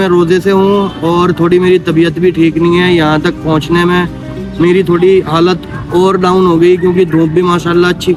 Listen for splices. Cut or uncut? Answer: uncut